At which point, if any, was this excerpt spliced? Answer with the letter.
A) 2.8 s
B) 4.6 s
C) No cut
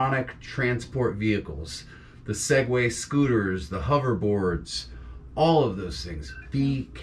C